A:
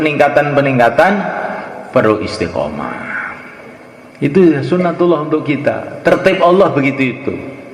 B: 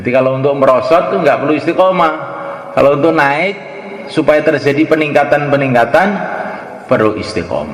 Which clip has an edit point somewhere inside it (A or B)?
A